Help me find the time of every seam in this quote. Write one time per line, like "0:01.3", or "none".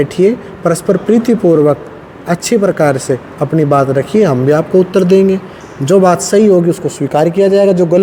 none